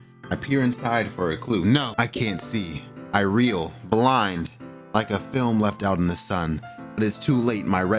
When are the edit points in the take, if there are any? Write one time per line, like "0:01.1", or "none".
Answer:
0:01.9